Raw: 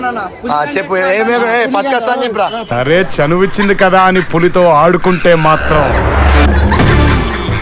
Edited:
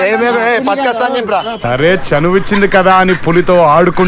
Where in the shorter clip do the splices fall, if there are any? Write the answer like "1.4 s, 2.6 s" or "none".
none